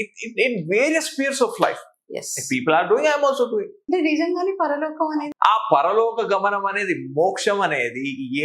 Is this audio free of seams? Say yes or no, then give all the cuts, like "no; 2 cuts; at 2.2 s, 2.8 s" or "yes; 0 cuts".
no; 2 cuts; at 3.8 s, 5.3 s